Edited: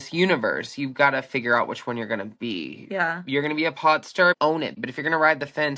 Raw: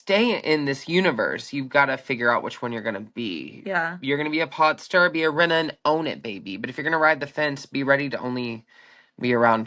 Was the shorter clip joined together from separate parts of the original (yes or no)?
yes